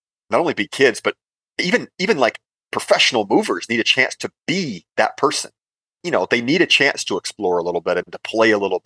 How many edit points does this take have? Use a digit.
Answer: 1